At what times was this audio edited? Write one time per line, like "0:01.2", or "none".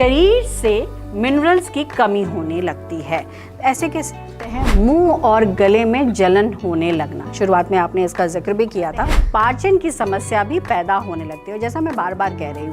0:04.6
0:09.2

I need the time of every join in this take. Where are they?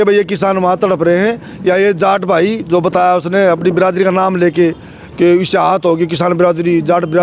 none

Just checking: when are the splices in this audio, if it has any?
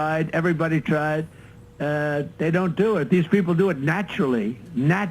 0:03.0

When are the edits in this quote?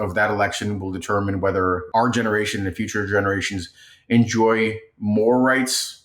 0:01.8

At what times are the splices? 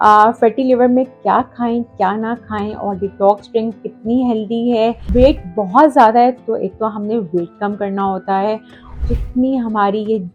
0:05.0
0:08.9

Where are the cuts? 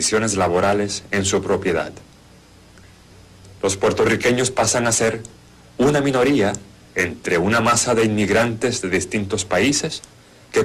0:02.9

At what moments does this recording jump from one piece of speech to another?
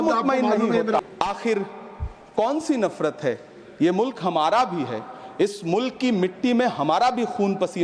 0:01.0

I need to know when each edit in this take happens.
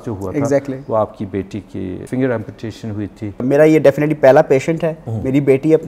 0:02.0
0:03.4

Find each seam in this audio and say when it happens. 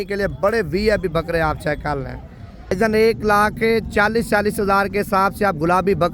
0:02.7

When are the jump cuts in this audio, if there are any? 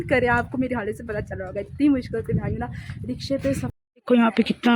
0:03.7

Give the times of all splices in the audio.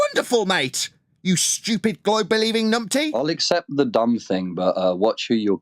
0:03.1

